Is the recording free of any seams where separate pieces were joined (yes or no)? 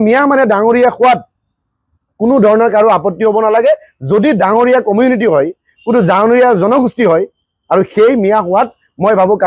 yes